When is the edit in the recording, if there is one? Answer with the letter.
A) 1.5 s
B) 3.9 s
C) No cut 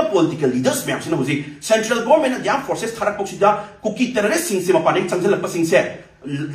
C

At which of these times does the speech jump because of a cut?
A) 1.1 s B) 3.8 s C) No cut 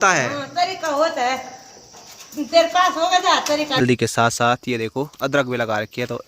B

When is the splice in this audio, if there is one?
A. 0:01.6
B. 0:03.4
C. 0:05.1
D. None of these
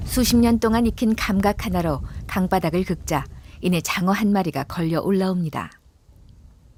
D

